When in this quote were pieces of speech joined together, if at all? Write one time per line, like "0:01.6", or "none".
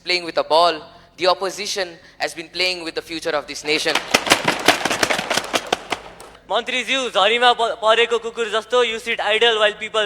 0:06.4